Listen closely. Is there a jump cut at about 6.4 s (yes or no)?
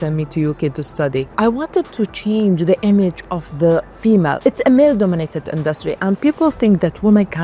no